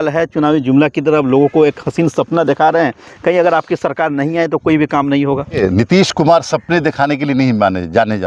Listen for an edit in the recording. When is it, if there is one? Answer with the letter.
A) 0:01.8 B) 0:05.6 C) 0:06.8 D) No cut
B